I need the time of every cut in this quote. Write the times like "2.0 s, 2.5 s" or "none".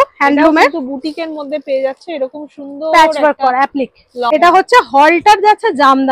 4.3 s